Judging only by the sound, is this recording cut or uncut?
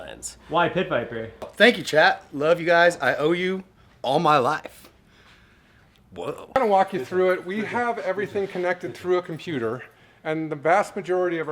cut